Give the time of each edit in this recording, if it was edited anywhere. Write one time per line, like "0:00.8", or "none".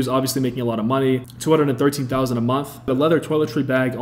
0:01.3
0:02.9